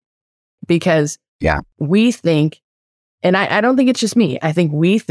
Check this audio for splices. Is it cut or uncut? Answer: uncut